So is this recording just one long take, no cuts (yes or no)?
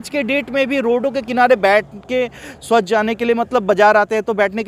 yes